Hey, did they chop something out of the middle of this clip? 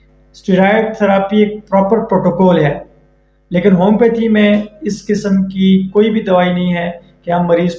no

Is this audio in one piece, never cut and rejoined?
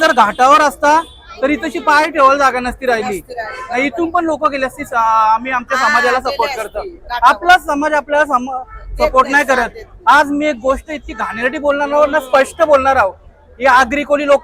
yes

